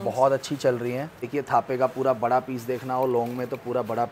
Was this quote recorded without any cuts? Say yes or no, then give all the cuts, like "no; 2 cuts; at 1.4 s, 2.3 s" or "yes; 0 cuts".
no; 1 cut; at 1.3 s